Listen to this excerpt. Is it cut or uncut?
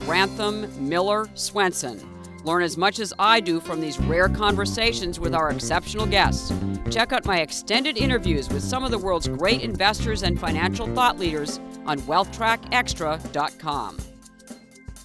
uncut